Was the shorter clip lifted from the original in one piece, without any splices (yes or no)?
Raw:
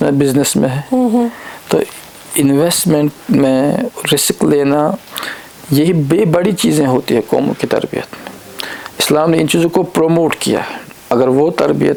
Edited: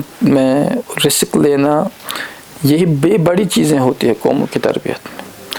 yes